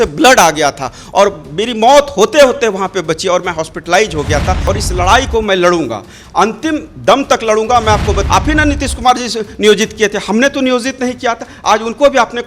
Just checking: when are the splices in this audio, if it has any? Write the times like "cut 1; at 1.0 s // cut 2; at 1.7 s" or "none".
cut 1; at 4.6 s // cut 2; at 8.2 s